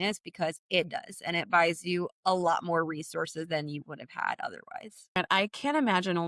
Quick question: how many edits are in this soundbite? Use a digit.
1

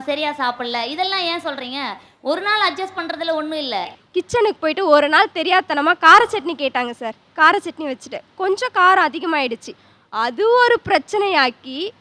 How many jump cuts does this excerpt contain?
1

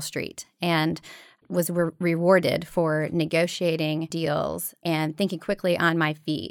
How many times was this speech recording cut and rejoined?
1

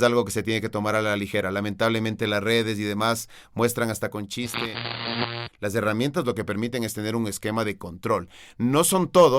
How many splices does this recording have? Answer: 1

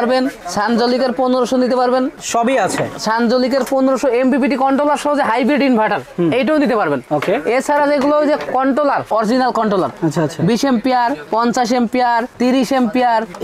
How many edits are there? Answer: 0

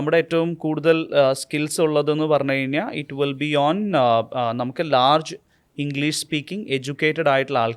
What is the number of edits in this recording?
0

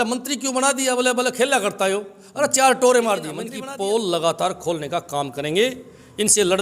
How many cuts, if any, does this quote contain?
1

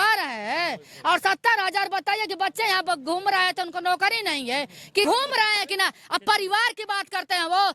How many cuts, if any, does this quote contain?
1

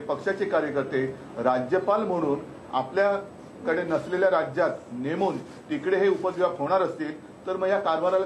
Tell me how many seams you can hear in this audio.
0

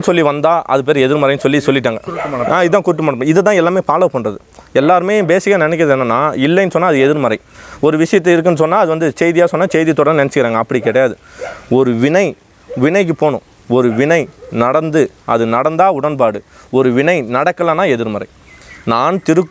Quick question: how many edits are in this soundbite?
0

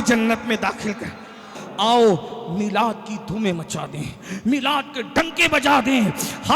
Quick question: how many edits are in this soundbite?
1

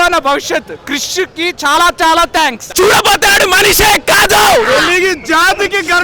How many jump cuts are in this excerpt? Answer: 1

